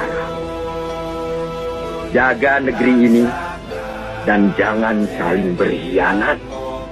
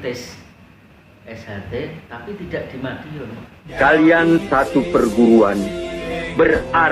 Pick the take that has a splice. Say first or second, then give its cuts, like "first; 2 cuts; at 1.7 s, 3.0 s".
second; 1 cut; at 3.6 s